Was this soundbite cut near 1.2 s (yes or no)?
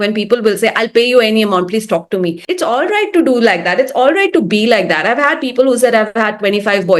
no